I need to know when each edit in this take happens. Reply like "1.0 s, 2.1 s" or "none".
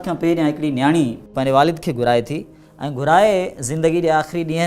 1.3 s